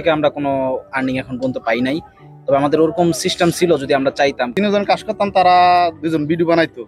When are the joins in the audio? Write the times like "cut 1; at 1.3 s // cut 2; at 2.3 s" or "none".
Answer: cut 1; at 4.5 s